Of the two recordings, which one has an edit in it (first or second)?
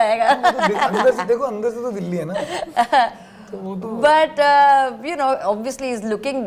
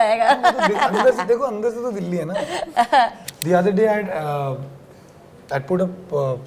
second